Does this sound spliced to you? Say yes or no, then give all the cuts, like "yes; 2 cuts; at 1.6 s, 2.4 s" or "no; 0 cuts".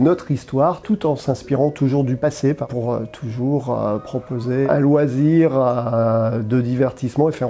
yes; 2 cuts; at 2.6 s, 4.7 s